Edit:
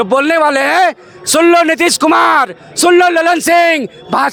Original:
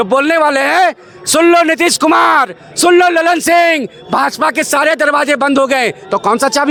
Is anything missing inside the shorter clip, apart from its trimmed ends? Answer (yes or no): no